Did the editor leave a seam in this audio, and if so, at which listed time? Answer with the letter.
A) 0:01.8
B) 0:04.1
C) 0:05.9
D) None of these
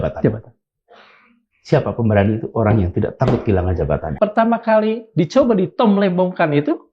B